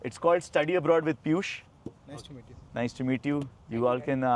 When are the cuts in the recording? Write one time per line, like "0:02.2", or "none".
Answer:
none